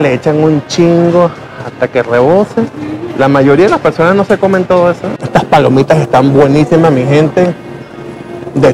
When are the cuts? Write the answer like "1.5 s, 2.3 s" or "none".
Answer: 5.1 s